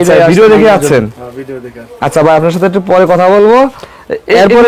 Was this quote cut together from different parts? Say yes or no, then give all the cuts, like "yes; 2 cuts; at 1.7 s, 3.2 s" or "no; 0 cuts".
no; 0 cuts